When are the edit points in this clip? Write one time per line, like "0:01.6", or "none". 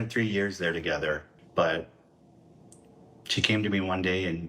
0:01.3